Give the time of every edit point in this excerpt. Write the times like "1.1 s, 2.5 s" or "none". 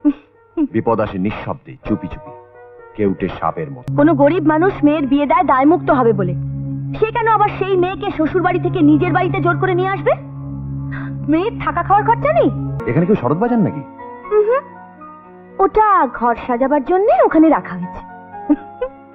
3.8 s, 12.7 s